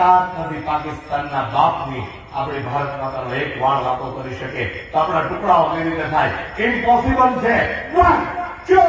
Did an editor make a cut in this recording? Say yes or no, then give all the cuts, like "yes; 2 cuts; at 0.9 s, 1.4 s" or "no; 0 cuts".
no; 0 cuts